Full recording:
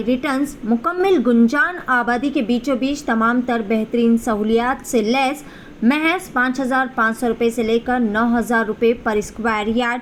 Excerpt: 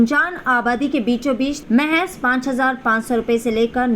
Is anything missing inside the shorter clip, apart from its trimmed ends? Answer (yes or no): yes